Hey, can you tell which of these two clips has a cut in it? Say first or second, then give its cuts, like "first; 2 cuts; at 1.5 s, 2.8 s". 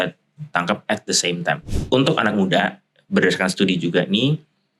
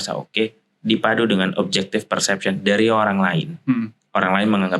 first; 1 cut; at 1.7 s